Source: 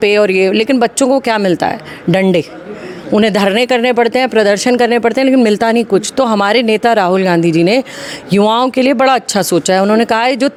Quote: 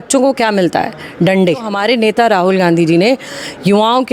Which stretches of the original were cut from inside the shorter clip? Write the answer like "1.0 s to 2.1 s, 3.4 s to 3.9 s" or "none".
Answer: 2.6 s to 6.4 s